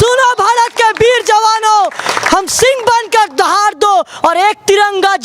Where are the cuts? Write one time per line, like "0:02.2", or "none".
none